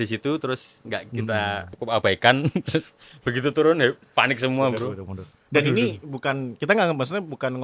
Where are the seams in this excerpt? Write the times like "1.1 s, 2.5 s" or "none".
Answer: 1.7 s